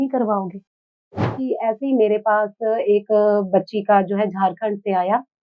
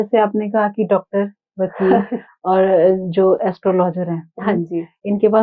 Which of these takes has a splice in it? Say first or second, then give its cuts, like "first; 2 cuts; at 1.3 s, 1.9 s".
first; 1 cut; at 1.2 s